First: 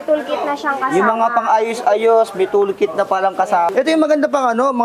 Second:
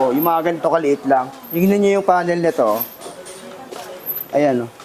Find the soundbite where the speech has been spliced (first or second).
first